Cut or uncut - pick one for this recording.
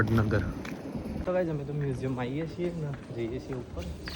cut